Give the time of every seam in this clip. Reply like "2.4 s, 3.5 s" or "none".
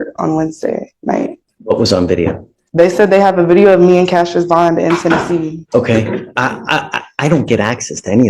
1.5 s, 5.6 s